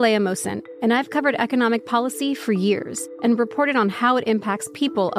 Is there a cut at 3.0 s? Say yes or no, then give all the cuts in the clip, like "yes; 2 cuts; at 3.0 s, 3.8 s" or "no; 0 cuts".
yes; 1 cut; at 3.0 s